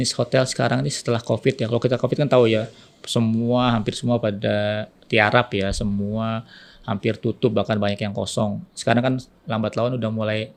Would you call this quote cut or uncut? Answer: uncut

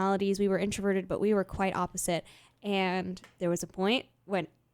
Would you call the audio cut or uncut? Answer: uncut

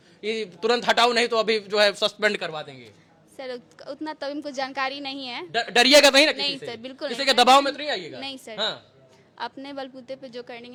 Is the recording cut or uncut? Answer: uncut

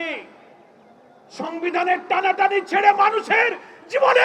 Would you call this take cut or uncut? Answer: uncut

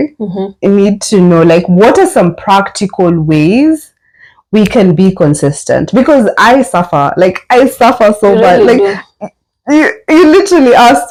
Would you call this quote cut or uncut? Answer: uncut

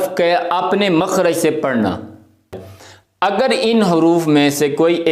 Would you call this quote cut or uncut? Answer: cut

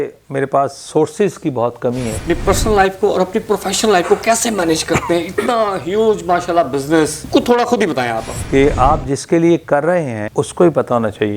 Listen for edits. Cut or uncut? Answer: cut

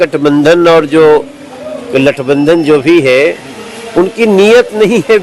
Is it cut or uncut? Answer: uncut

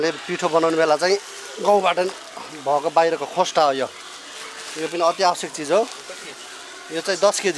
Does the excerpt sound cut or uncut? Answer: uncut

